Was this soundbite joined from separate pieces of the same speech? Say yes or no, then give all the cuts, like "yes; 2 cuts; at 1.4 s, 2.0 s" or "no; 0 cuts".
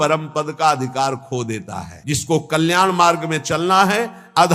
yes; 1 cut; at 1.9 s